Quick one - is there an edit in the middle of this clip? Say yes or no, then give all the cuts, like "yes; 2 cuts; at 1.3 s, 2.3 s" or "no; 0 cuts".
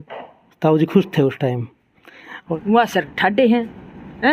yes; 1 cut; at 2.4 s